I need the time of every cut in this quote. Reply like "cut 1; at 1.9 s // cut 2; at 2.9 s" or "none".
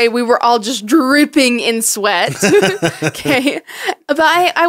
none